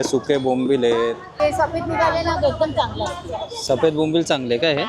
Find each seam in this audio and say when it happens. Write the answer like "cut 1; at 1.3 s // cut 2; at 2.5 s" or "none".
cut 1; at 1.3 s